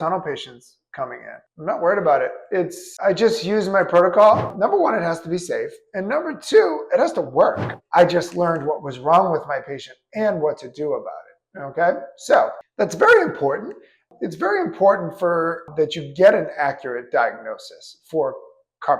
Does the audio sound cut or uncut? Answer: cut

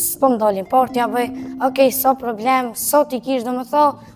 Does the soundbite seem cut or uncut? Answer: uncut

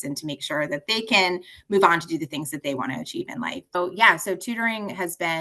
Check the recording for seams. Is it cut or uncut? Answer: cut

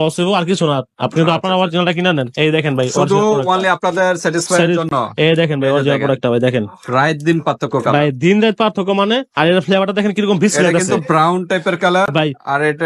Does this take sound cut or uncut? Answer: uncut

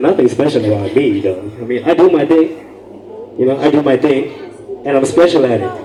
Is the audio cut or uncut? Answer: uncut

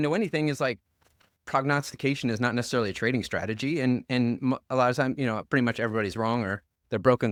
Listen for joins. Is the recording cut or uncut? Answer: uncut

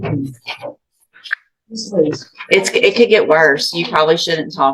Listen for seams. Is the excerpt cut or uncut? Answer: uncut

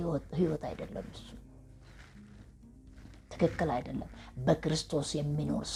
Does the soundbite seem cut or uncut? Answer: uncut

